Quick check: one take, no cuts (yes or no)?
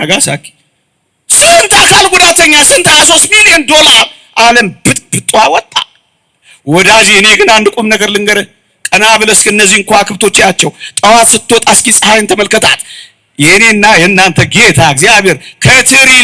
yes